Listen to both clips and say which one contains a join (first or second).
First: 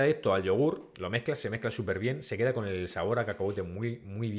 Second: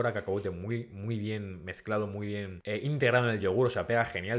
second